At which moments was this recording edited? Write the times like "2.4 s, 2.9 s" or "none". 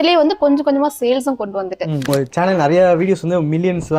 2.1 s

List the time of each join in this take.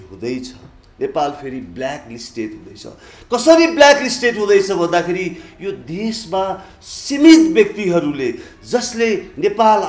none

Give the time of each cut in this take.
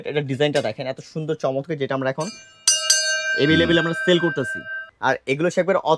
4.8 s

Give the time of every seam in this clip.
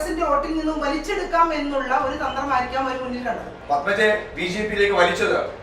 3.5 s

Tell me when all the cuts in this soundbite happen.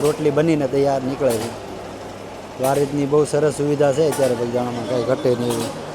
none

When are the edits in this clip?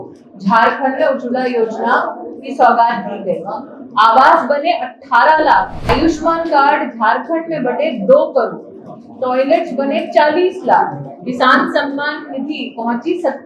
5.9 s

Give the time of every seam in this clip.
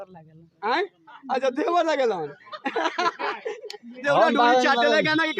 4.0 s

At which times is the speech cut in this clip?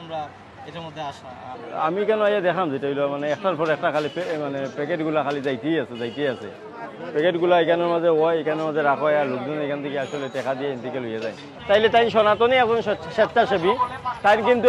1.5 s, 11.5 s

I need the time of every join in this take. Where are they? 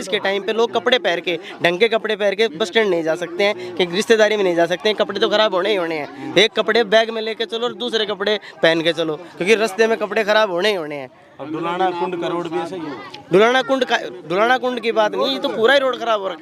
none

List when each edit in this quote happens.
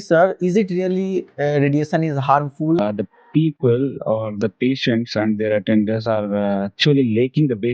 2.8 s

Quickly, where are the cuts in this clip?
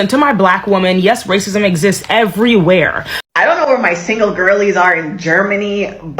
3.1 s

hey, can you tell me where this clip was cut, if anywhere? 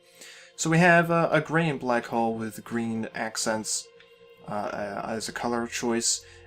2.6 s

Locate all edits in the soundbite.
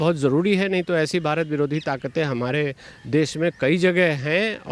none

